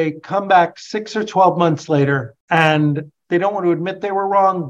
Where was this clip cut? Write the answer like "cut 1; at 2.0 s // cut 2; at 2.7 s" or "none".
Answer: cut 1; at 2.3 s // cut 2; at 3.1 s